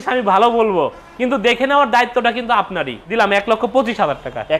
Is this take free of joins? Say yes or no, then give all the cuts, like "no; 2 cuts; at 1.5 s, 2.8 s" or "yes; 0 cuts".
no; 1 cut; at 3.0 s